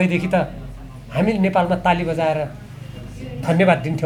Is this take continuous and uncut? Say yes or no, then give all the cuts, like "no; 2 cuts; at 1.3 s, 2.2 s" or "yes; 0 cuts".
yes; 0 cuts